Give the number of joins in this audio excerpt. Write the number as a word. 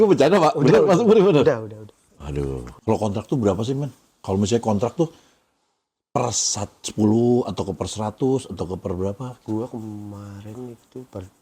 one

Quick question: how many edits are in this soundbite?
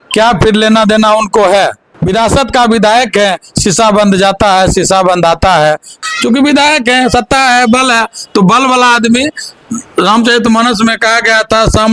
two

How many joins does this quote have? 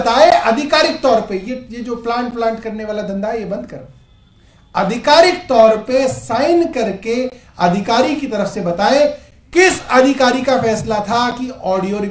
zero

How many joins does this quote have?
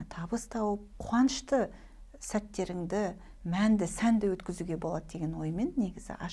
one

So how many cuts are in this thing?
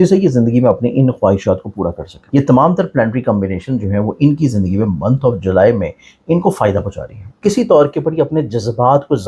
two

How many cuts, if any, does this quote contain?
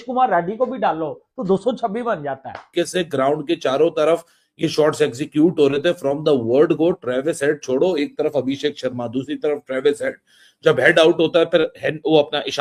one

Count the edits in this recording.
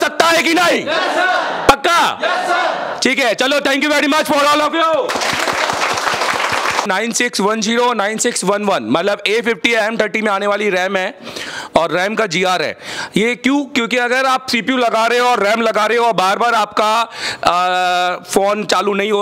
one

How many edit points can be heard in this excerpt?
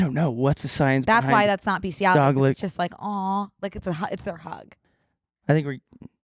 one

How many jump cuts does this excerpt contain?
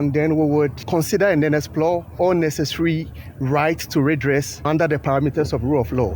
three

